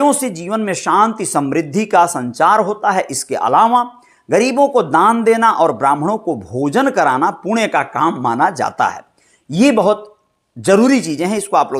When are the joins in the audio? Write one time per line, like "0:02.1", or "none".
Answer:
none